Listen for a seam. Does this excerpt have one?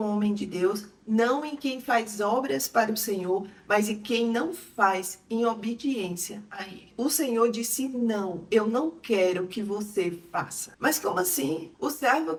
no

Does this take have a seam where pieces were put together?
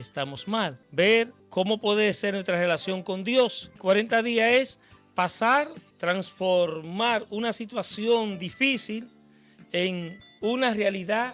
yes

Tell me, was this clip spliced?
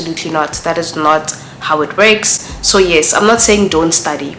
no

